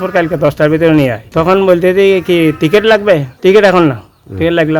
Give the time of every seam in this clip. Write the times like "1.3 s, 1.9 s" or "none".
1.2 s, 3.3 s